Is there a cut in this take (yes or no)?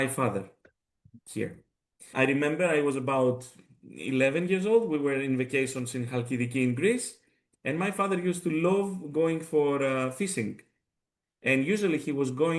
no